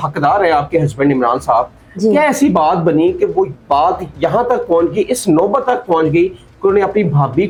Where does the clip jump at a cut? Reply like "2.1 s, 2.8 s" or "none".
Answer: none